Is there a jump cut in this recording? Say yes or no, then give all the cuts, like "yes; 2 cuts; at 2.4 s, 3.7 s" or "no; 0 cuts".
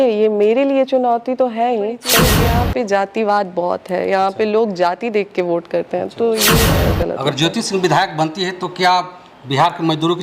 yes; 2 cuts; at 2.3 s, 6.8 s